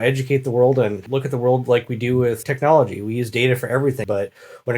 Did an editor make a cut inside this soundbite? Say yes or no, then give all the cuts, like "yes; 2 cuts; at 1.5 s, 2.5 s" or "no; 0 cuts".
yes; 3 cuts; at 1.0 s, 2.5 s, 4.0 s